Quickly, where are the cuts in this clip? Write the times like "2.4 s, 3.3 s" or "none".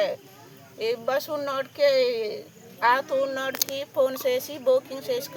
none